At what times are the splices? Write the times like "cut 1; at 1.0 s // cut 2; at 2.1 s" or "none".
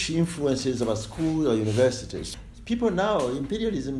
cut 1; at 2.2 s